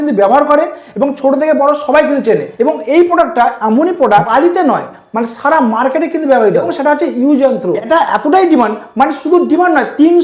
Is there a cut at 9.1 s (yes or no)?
no